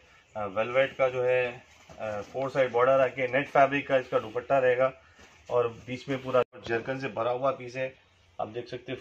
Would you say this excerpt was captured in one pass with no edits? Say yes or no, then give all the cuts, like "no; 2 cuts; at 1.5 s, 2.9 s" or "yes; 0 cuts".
no; 1 cut; at 6.5 s